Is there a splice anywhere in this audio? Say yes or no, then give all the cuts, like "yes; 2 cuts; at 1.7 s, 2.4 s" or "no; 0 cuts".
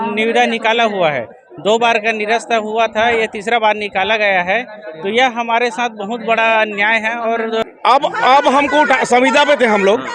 yes; 1 cut; at 7.7 s